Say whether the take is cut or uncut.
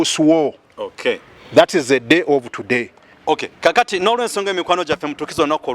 uncut